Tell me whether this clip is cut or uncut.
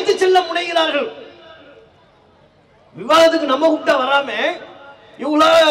uncut